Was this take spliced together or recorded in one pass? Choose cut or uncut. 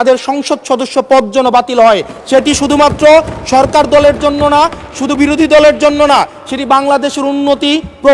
uncut